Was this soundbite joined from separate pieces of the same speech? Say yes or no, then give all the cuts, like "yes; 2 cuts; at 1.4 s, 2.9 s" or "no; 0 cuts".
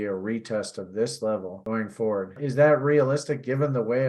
yes; 1 cut; at 2.4 s